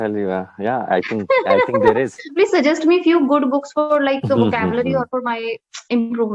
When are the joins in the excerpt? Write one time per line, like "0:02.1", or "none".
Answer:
0:02.2